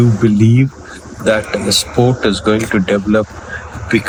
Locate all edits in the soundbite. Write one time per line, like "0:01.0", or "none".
none